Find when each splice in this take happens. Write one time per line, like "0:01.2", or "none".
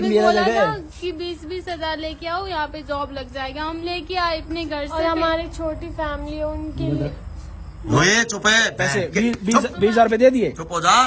none